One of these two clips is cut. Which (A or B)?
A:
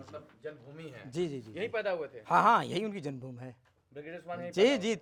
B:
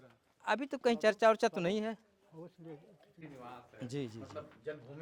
B